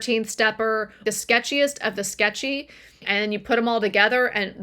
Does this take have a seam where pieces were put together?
yes; 2 cuts; at 1.0 s, 3.0 s

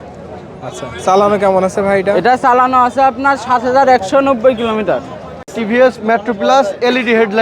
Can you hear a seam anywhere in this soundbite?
yes; 1 cut; at 5.5 s

